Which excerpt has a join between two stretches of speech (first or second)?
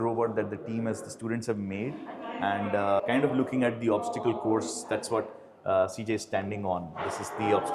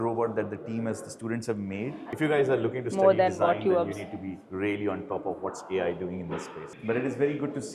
second